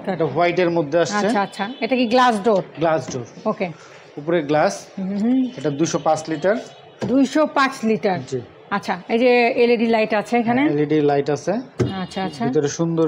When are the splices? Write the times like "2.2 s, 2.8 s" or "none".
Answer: none